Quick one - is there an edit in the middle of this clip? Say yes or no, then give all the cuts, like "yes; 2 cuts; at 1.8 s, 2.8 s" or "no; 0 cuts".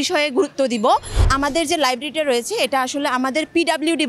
yes; 1 cut; at 1.2 s